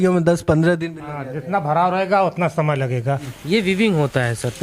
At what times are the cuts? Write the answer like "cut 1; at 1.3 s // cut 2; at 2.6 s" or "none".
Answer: cut 1; at 3.3 s